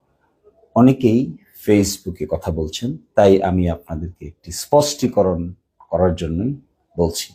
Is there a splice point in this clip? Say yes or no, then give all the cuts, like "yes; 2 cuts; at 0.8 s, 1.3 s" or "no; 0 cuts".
no; 0 cuts